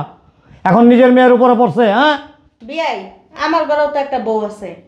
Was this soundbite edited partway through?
no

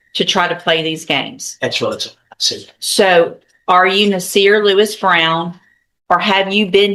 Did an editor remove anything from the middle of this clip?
no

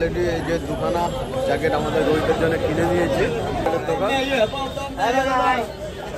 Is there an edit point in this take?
yes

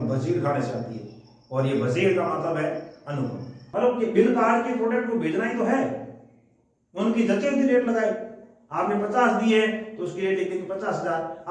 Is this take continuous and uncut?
no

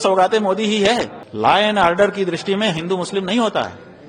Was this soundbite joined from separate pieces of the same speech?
yes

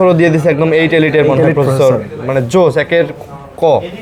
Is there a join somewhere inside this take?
no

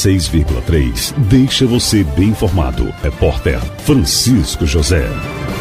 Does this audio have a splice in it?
no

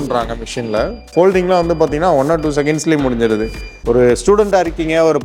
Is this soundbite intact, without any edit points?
no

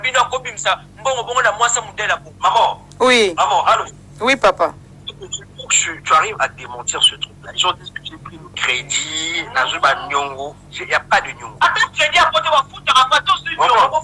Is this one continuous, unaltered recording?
no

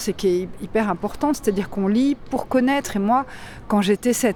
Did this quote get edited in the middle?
no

